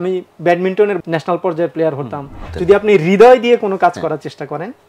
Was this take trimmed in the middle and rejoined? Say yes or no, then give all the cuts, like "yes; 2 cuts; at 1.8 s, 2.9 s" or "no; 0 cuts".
yes; 2 cuts; at 1.0 s, 2.5 s